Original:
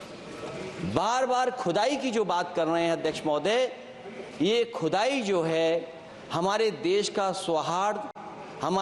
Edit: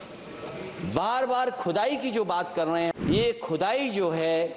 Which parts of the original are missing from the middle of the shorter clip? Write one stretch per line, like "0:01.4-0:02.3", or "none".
0:03.0-0:04.3